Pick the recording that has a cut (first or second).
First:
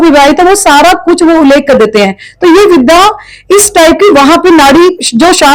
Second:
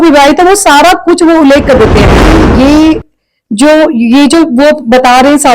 second